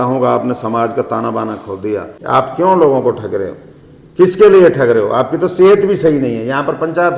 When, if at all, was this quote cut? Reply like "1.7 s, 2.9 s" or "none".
2.1 s